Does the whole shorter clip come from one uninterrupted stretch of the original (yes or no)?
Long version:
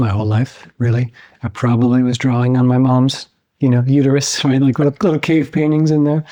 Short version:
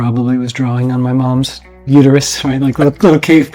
no